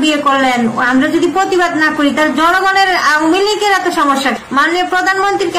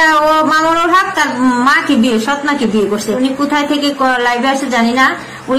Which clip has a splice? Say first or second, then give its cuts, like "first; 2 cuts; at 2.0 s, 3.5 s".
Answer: first; 1 cut; at 4.2 s